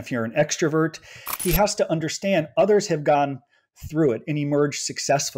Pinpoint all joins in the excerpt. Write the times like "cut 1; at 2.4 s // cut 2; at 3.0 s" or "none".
cut 1; at 1.2 s